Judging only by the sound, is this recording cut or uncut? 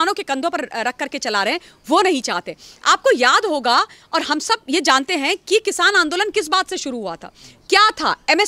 uncut